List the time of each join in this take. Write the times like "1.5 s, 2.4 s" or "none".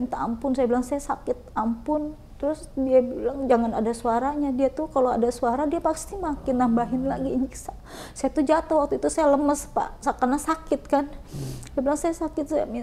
none

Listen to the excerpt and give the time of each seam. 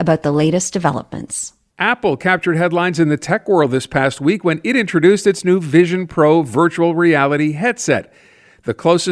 1.4 s

